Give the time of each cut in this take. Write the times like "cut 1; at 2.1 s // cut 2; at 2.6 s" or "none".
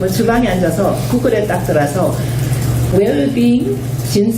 none